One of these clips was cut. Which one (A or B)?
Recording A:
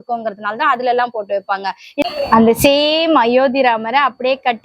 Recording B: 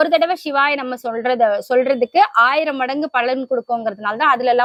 A